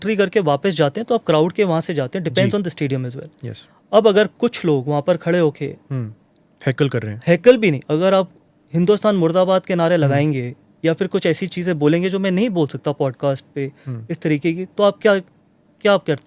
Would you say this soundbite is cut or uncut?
uncut